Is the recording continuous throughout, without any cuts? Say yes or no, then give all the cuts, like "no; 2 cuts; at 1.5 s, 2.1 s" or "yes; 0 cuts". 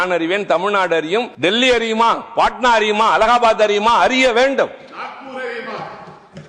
no; 1 cut; at 1.3 s